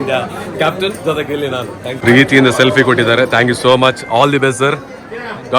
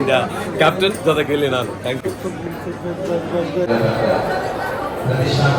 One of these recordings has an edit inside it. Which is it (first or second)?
first